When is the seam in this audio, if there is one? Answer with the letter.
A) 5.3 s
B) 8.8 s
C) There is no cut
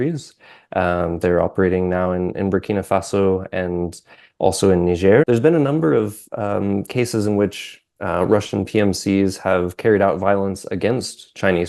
A